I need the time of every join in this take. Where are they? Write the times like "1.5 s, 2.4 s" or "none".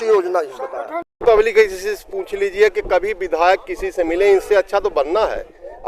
1.2 s